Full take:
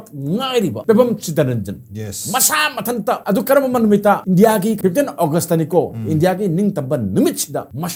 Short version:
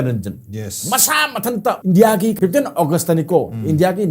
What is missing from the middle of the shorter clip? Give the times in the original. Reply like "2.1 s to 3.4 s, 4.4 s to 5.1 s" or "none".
3.2 s to 4.2 s

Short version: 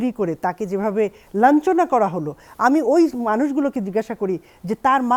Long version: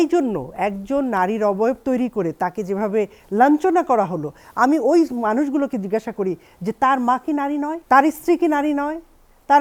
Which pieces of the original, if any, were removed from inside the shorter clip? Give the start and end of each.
none

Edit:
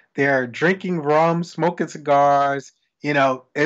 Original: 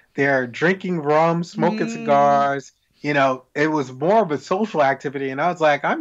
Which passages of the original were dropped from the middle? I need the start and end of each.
none

